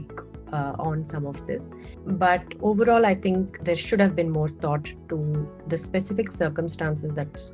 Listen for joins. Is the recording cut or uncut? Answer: cut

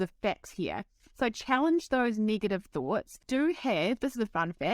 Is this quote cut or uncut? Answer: cut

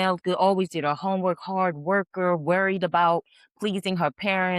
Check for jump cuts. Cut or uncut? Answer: uncut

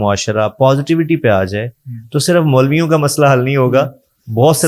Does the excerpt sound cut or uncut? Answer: uncut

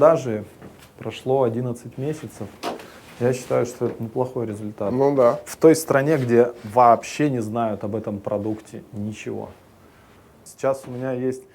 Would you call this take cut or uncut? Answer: uncut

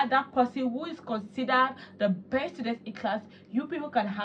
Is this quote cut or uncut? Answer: uncut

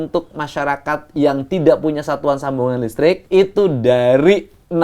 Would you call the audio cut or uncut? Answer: cut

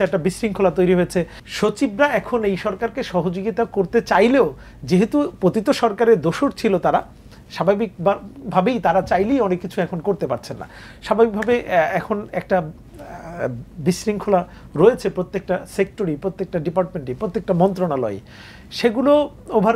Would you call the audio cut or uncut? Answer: cut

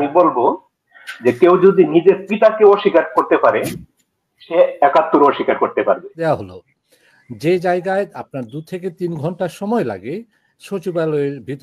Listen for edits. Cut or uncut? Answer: cut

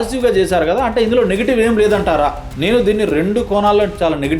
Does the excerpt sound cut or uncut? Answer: cut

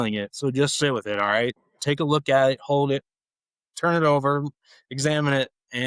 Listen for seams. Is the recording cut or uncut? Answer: uncut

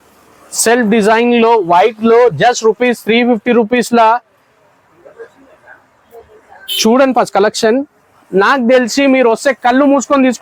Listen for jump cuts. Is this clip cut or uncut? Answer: uncut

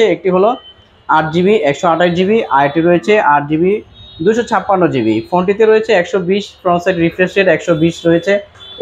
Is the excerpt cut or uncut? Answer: uncut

